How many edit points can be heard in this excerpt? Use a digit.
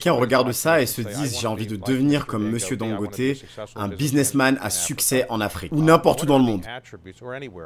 1